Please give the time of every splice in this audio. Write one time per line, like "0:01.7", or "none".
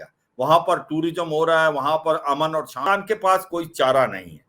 0:02.9